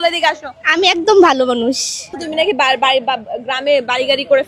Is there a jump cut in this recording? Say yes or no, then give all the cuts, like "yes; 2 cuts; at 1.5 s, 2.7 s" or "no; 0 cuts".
yes; 1 cut; at 2.2 s